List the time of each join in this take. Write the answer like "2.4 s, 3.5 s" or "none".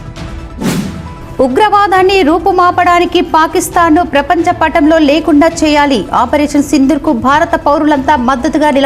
1.0 s